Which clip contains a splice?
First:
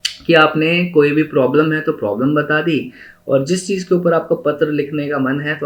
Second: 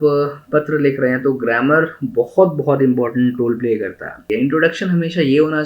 second; 1 cut; at 4.2 s

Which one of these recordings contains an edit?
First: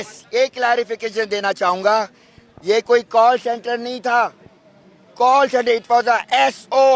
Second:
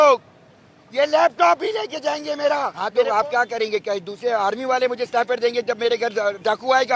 second; 1 cut; at 2.8 s

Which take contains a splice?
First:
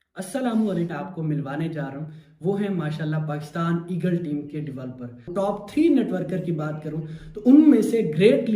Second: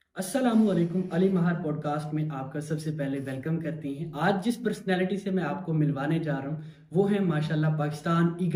first; 2 cuts; at 0.9 s, 5.3 s

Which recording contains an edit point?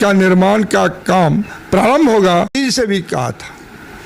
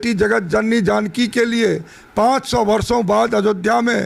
first; 1 cut; at 2.5 s

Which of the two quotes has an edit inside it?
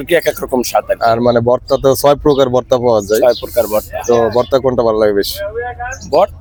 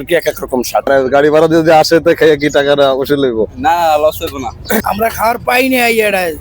second; 2 cuts; at 0.9 s, 4.9 s

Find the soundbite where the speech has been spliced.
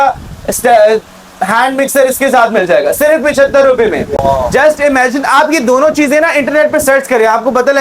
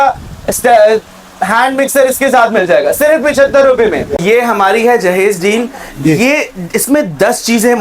second; 1 cut; at 4.2 s

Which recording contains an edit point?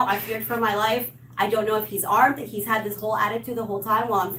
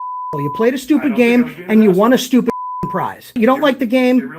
second; 1 cut; at 3.4 s

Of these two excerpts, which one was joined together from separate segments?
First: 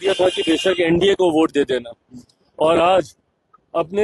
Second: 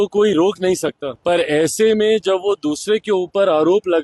second; 1 cut; at 1.1 s

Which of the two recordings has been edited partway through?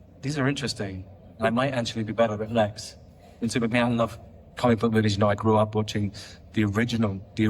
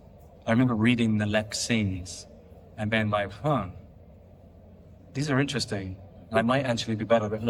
first; 1 cut; at 3.7 s

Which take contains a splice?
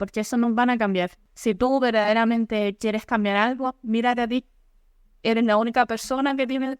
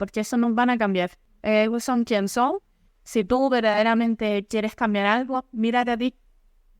first; 1 cut; at 1.2 s

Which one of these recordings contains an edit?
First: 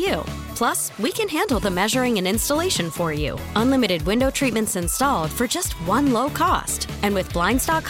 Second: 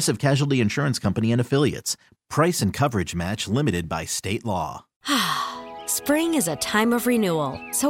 second; 1 cut; at 4.9 s

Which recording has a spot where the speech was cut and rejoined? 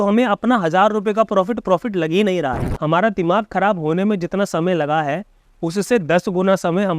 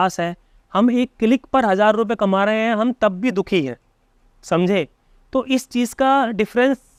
first; 1 cut; at 2.7 s

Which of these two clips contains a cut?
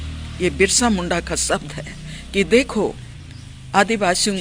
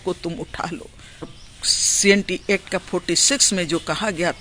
second; 1 cut; at 1.3 s

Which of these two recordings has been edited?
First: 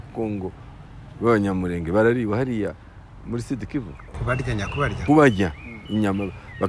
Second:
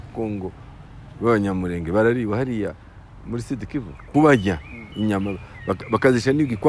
second; 1 cut; at 4.0 s

